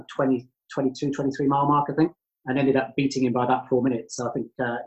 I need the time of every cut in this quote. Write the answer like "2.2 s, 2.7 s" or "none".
none